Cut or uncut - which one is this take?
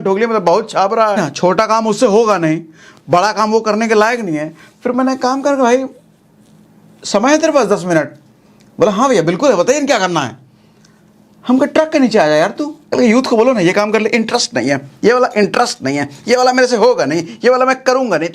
cut